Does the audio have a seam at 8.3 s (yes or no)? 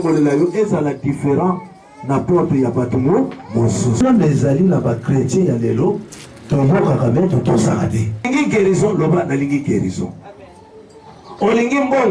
yes